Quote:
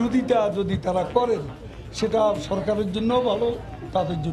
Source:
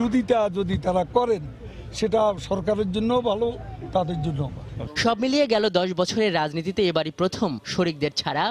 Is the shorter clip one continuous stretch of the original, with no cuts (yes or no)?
yes